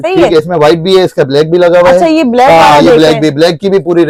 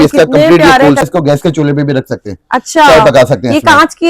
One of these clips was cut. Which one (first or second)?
second